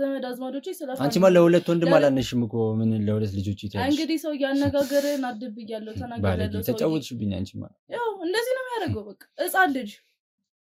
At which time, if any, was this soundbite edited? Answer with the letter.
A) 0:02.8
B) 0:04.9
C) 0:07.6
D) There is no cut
D